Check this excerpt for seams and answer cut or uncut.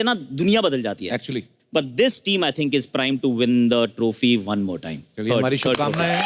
uncut